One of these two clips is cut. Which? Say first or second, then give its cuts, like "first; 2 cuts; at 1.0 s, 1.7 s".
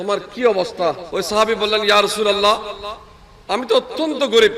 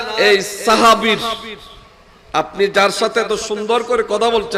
first; 1 cut; at 1.0 s